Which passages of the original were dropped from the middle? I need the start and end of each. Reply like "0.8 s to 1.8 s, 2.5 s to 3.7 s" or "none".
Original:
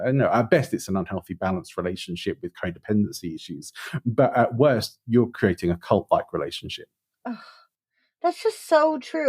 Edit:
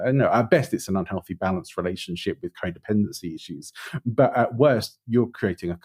none